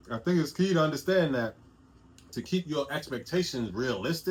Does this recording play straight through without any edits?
yes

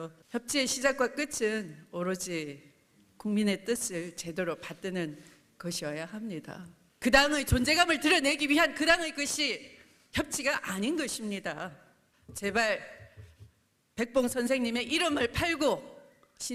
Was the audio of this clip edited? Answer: no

